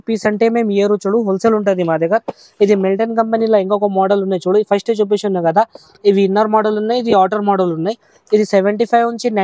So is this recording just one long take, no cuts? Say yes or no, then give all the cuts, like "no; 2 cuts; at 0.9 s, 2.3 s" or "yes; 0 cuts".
yes; 0 cuts